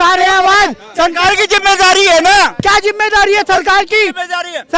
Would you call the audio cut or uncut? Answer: uncut